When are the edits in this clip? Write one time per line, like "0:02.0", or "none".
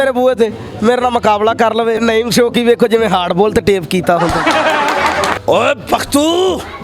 0:02.0
0:05.4